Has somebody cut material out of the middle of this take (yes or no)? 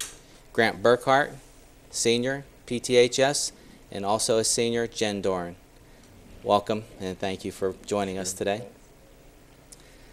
no